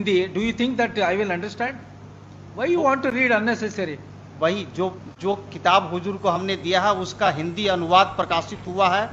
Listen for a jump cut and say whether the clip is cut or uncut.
uncut